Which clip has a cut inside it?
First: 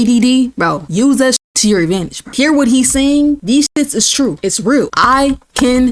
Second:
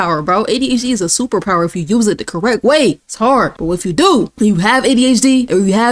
first; 3 cuts; at 1.2 s, 3.4 s, 4.8 s

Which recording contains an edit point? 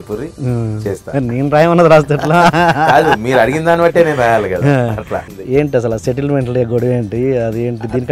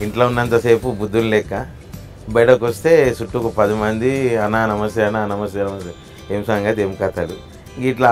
first; 1 cut; at 5.4 s

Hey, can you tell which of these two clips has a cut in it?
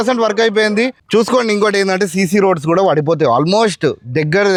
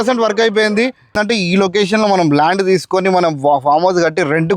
second; 1 cut; at 1.1 s

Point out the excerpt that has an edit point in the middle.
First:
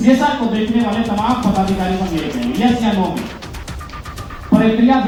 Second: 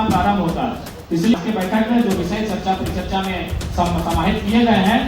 second; 1 cut; at 1.3 s

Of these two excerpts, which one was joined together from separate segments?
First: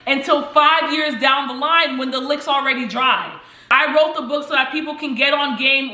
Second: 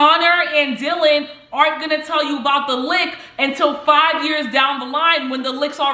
first; 1 cut; at 3.7 s

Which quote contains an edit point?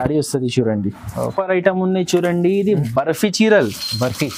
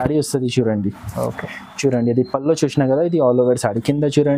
first; 1 cut; at 1.3 s

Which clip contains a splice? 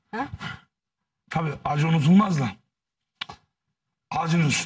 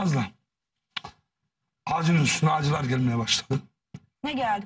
first; 1 cut; at 1.1 s

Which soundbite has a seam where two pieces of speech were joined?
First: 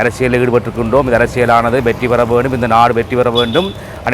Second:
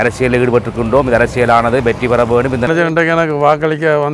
second; 1 cut; at 2.7 s

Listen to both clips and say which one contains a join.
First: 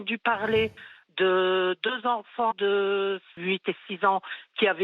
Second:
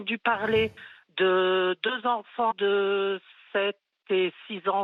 first; 1 cut; at 3.3 s

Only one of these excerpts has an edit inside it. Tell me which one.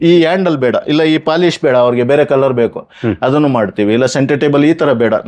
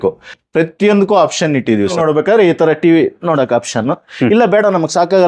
second; 1 cut; at 1.9 s

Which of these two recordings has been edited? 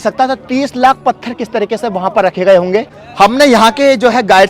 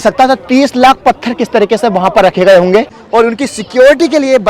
second; 1 cut; at 3.0 s

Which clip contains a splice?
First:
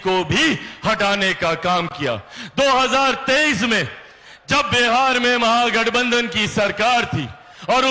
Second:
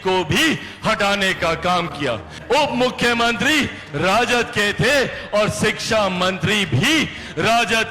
second; 1 cut; at 2.3 s

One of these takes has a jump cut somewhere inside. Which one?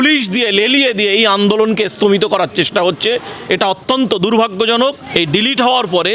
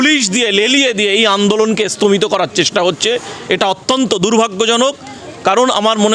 first; 1 cut; at 5.1 s

